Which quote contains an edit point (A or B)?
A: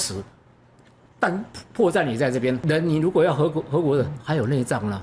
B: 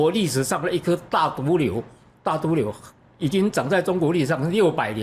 A